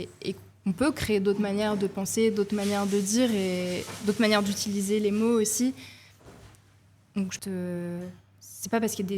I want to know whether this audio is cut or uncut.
cut